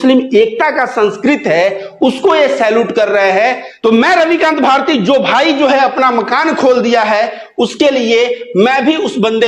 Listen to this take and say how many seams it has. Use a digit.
0